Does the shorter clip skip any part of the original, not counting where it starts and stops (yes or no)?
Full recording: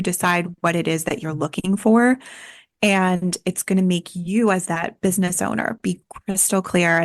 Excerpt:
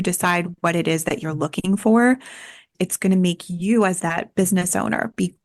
yes